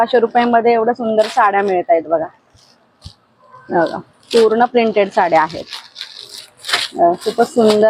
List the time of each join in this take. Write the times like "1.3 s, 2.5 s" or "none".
none